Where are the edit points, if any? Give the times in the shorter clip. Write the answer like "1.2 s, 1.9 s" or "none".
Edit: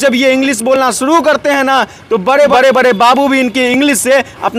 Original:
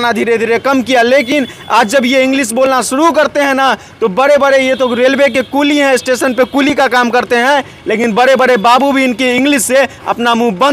2.5 s